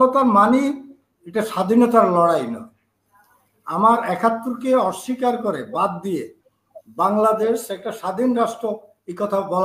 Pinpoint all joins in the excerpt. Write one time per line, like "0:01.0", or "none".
none